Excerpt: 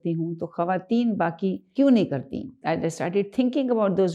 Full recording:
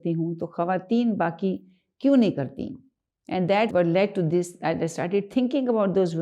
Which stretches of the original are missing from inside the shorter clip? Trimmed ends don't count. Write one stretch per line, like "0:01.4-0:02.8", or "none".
0:01.6-0:01.9
0:02.8-0:04.5